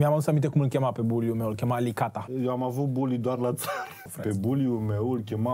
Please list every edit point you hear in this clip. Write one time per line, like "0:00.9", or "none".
0:02.3
0:04.1